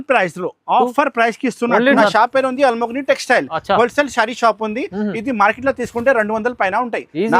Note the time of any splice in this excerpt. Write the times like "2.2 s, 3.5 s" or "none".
2.0 s